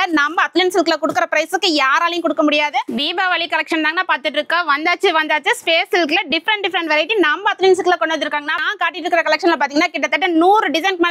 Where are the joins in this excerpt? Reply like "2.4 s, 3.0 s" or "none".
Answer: 2.9 s, 8.6 s